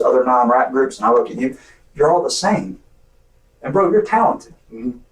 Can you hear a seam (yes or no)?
yes